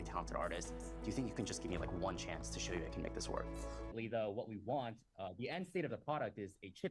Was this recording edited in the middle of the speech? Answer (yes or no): yes